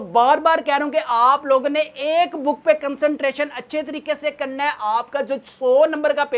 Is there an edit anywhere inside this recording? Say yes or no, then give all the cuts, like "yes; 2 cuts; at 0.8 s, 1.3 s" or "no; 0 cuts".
no; 0 cuts